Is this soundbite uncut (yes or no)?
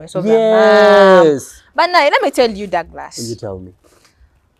yes